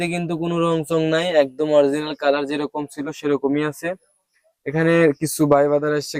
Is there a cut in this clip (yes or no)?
no